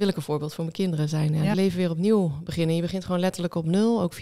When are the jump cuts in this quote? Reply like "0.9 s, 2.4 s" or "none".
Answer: 1.6 s